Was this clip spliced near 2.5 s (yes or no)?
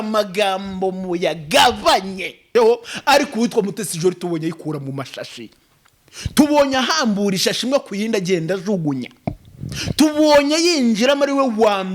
yes